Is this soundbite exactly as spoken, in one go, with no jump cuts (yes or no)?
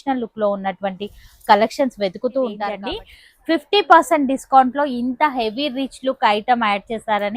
no